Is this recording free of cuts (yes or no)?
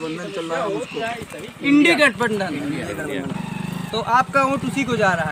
yes